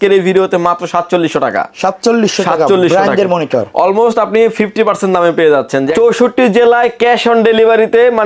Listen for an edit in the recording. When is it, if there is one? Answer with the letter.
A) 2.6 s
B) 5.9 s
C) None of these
B